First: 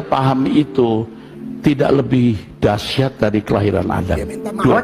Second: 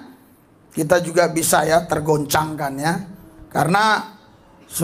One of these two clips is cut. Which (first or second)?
second